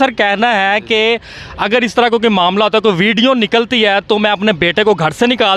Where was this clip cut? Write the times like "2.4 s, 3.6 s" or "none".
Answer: none